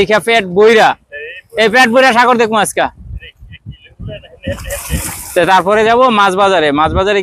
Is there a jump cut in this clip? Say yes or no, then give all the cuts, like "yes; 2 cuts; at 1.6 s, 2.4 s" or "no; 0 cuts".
no; 0 cuts